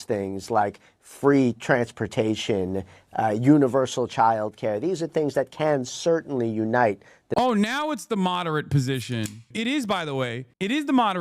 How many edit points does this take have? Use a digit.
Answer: 1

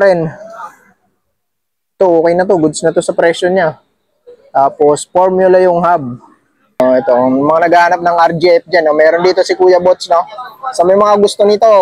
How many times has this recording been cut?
1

